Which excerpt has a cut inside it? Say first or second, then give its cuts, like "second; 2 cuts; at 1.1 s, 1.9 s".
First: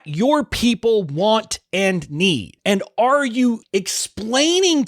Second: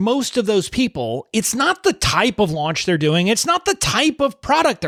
first; 2 cuts; at 2.5 s, 3.6 s